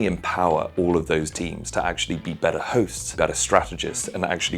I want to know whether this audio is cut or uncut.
cut